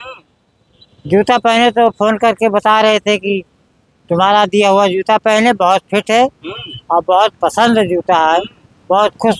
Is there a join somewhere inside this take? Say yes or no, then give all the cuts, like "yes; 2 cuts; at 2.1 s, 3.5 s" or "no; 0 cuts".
no; 0 cuts